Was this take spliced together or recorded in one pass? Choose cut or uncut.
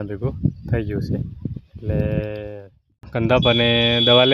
cut